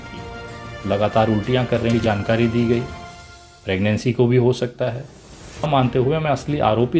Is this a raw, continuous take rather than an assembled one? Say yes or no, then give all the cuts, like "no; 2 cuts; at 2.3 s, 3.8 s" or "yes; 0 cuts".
no; 2 cuts; at 2.0 s, 5.7 s